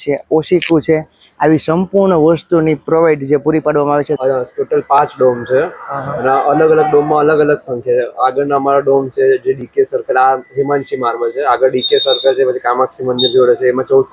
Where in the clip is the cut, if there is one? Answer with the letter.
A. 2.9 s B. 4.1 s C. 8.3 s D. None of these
B